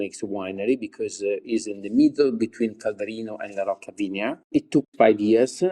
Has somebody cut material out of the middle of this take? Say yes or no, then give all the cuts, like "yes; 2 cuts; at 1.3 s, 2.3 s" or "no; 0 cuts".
yes; 1 cut; at 4.8 s